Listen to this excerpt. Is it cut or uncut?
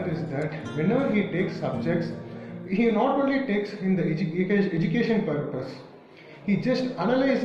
uncut